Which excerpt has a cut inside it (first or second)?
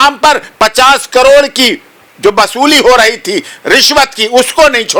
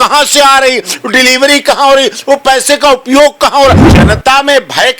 second